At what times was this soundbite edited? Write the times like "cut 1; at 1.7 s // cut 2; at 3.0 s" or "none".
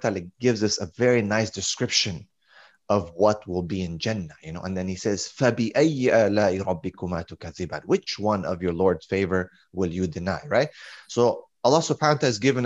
none